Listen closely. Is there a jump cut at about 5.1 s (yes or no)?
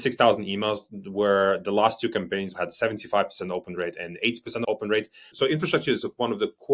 yes